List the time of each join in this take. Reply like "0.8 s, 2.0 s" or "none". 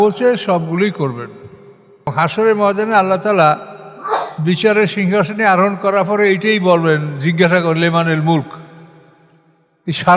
2.1 s